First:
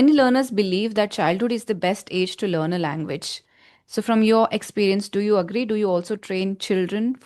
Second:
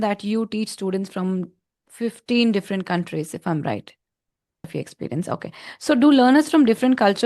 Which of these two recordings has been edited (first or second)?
second